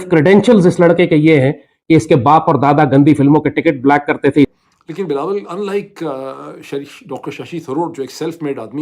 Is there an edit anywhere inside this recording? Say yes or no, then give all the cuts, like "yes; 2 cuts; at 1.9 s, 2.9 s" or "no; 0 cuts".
yes; 1 cut; at 4.5 s